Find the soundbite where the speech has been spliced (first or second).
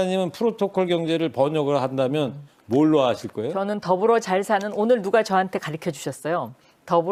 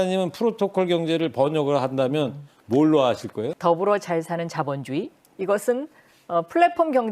second